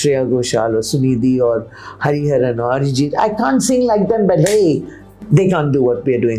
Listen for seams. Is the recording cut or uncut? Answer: cut